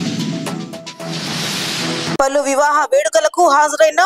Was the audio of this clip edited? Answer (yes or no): no